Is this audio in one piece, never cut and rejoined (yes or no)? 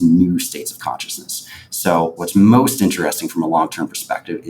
no